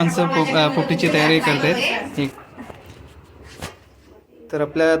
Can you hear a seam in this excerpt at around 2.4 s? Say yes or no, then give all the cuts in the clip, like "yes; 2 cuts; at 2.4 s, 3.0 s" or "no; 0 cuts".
yes; 1 cut; at 2.4 s